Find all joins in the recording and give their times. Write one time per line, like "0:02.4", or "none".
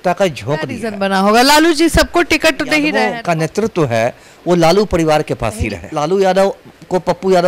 0:00.9
0:03.1
0:05.8